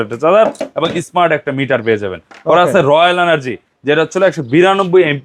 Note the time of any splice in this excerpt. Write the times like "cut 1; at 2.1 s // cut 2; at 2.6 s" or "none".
none